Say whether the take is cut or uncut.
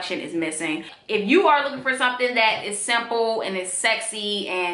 cut